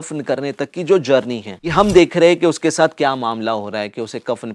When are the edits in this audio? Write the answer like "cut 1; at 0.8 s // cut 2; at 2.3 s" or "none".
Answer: cut 1; at 1.6 s